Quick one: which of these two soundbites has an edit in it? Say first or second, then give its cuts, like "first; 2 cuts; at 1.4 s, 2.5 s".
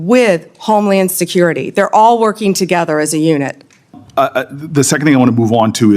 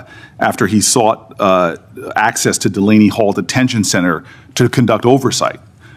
first; 1 cut; at 4.0 s